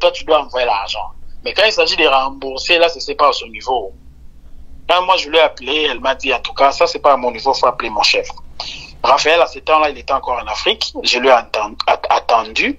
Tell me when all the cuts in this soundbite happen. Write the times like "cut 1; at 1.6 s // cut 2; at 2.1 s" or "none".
none